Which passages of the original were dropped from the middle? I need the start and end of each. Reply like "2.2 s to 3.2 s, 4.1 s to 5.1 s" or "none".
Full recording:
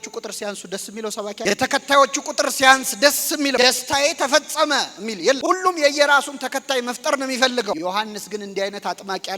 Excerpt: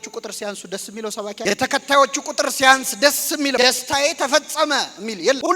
none